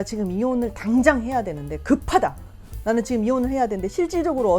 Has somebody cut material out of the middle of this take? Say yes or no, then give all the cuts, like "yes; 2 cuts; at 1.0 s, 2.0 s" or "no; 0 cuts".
no; 0 cuts